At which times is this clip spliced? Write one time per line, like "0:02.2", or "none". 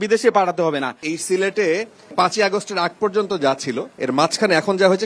0:01.1
0:02.1